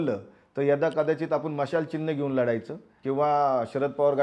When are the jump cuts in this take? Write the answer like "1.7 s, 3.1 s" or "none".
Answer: 2.9 s